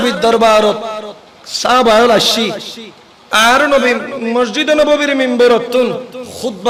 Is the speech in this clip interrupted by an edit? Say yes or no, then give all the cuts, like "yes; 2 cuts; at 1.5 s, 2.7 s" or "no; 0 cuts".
no; 0 cuts